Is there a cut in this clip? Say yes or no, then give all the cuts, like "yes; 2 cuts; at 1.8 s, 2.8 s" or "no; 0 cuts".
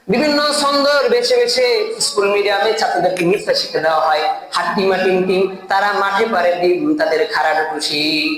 no; 0 cuts